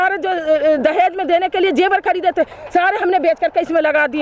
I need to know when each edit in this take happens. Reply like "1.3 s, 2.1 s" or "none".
none